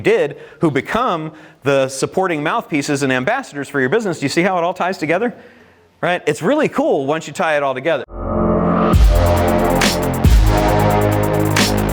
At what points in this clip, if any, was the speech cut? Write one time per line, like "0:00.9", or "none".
0:08.2